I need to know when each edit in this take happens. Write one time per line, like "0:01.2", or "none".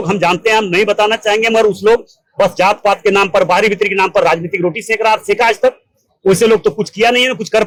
none